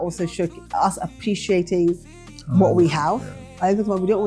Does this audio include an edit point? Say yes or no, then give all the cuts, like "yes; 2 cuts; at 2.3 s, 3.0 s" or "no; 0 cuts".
no; 0 cuts